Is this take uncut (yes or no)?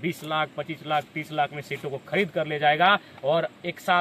yes